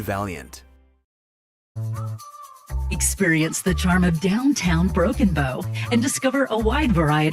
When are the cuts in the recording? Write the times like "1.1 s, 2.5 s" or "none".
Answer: 1.8 s